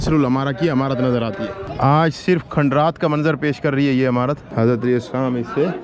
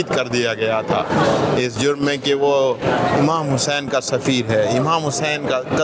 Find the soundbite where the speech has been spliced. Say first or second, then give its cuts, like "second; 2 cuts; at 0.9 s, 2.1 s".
first; 2 cuts; at 1.6 s, 4.5 s